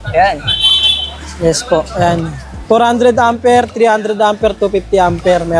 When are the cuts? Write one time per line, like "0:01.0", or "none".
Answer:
none